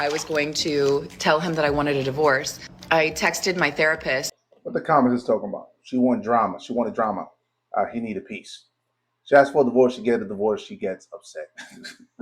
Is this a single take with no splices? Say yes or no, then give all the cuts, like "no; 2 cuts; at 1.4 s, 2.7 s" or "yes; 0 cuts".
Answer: yes; 0 cuts